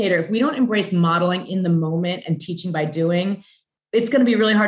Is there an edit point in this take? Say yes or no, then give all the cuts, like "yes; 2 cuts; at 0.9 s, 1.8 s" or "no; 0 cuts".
no; 0 cuts